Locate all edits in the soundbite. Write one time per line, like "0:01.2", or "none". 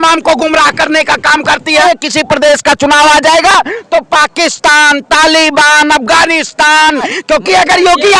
0:01.8
0:07.1